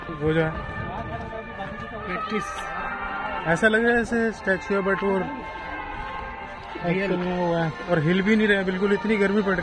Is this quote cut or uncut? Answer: uncut